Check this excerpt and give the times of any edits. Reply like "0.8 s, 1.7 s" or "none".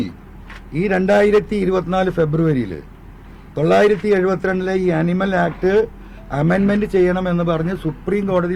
none